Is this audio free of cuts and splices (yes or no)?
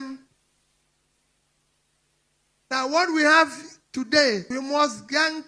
no